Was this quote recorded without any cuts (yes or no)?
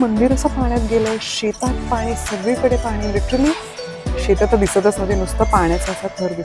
yes